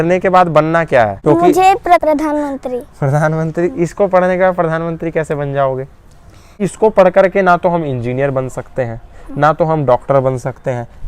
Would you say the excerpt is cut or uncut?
cut